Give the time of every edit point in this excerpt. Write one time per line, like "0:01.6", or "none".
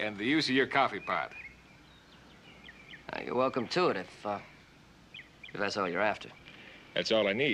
0:01.2